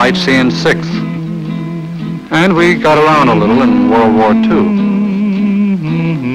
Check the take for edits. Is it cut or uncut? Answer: cut